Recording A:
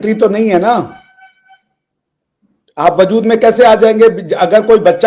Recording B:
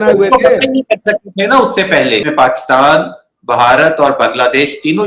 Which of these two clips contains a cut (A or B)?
B